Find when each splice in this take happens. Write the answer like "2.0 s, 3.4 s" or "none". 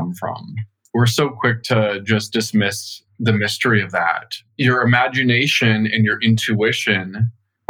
4.3 s